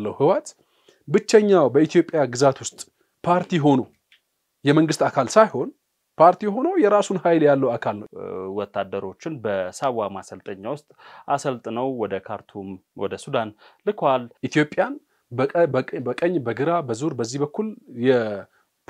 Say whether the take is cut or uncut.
cut